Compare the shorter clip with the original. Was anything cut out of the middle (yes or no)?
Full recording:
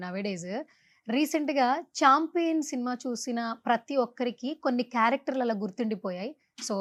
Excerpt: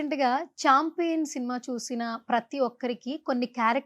no